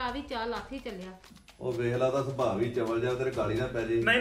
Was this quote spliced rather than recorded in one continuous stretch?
yes; 1 cut; at 1.2 s

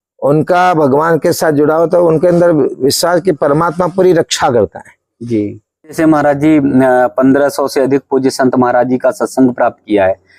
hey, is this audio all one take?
no; 1 cut; at 6.0 s

